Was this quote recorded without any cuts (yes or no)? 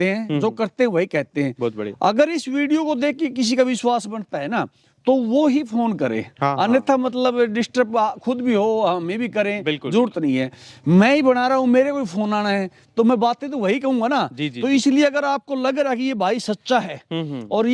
yes